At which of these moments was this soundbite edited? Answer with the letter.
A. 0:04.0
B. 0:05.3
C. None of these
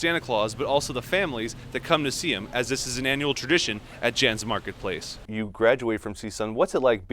B